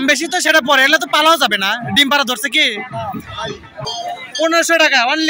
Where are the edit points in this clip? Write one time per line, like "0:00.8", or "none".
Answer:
0:03.9